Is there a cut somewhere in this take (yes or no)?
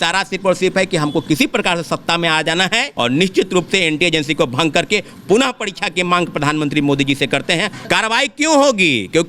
yes